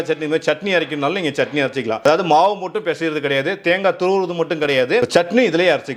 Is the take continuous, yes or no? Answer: yes